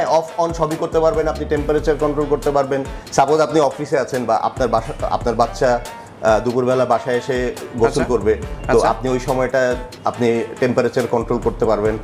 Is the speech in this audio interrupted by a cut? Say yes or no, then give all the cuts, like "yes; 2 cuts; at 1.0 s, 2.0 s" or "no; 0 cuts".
no; 0 cuts